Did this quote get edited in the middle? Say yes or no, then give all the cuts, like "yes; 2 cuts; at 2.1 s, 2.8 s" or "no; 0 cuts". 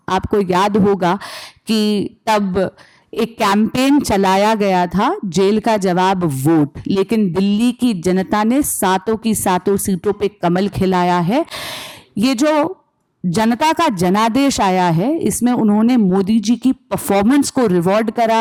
no; 0 cuts